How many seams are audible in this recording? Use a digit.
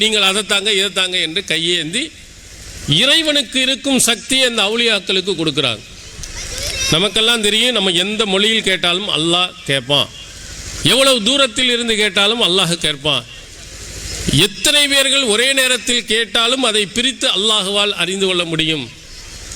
0